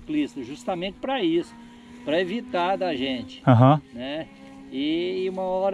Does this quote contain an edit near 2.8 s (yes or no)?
no